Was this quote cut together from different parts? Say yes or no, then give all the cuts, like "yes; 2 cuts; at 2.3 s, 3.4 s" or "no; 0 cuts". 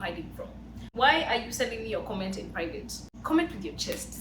yes; 2 cuts; at 0.9 s, 3.1 s